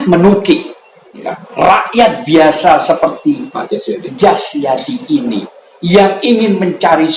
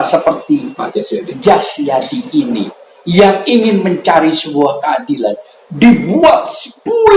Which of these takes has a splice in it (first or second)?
first